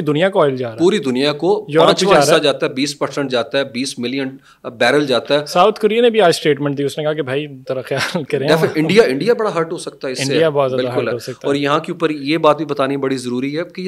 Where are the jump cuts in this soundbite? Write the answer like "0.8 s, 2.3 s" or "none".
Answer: none